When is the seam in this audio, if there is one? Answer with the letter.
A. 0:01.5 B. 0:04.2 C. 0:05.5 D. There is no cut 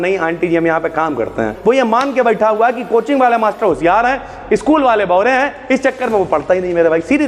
A